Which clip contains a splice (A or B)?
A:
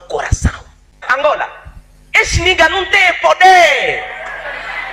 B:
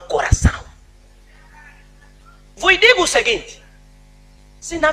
A